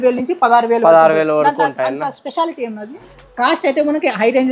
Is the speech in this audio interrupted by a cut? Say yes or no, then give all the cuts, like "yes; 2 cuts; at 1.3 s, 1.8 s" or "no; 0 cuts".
yes; 1 cut; at 3.1 s